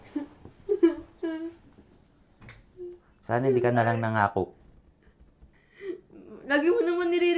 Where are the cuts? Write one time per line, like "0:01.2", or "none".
0:05.6